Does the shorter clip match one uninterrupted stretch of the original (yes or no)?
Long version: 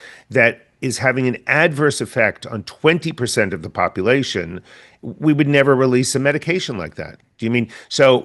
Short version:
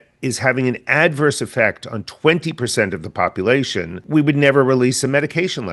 no